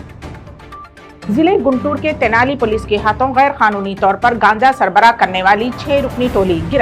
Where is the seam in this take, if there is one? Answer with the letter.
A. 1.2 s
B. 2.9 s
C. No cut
A